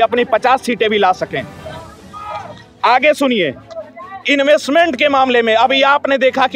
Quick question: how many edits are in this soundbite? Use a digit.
0